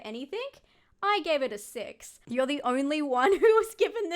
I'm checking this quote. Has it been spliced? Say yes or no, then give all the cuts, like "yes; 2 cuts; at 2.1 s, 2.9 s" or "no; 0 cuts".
yes; 1 cut; at 2.1 s